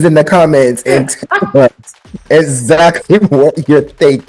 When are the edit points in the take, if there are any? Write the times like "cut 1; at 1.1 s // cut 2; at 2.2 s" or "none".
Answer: none